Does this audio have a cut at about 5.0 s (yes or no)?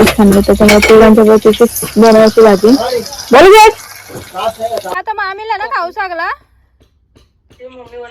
yes